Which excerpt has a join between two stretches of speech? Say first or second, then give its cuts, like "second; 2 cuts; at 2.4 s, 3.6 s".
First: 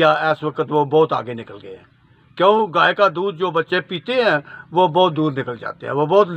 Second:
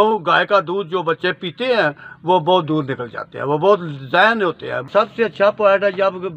second; 1 cut; at 4.8 s